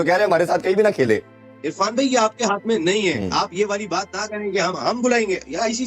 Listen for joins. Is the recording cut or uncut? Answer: uncut